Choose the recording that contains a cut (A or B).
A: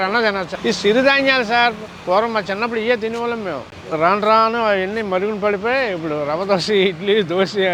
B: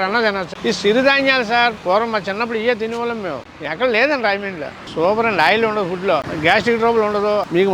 B